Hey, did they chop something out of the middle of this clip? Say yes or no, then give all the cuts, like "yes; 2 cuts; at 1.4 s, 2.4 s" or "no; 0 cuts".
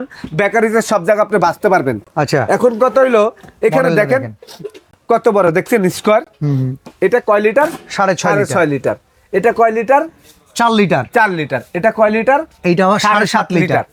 no; 0 cuts